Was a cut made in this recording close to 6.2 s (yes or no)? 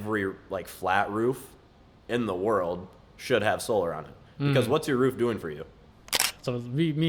yes